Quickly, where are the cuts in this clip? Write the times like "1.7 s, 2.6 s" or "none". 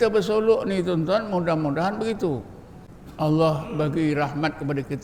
none